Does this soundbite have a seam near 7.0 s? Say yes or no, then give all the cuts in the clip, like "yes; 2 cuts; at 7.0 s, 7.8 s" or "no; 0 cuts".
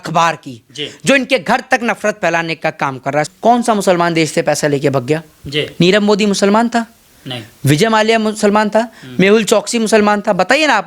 no; 1 cut; at 3.3 s